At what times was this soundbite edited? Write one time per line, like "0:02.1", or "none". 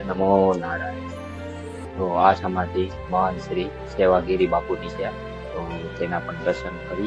0:01.8